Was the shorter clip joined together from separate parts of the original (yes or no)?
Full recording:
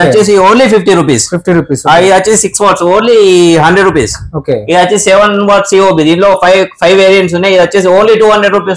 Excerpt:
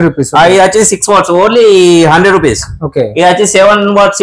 no